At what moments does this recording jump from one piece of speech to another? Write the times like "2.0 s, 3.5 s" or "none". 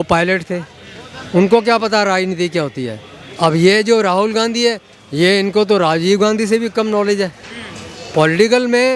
none